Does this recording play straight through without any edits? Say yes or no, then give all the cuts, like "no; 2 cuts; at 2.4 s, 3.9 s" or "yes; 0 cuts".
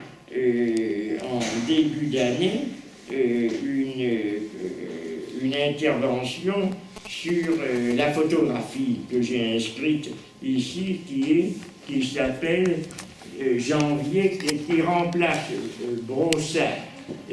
yes; 0 cuts